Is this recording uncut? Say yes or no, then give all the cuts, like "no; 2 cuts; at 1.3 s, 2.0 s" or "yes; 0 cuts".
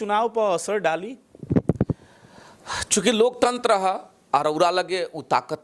yes; 0 cuts